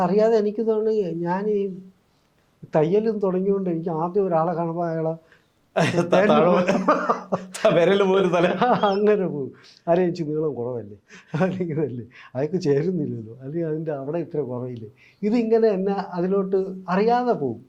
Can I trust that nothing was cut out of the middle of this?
yes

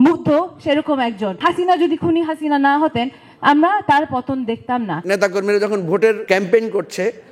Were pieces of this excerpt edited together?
yes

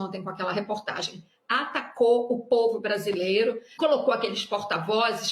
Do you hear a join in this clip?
yes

